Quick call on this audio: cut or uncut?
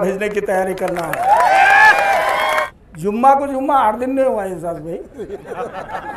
cut